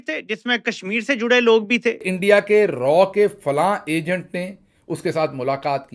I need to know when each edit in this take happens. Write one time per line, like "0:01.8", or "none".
0:02.1